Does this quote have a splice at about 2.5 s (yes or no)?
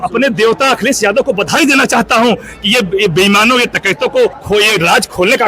no